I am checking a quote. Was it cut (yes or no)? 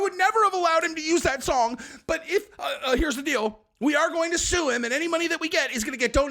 no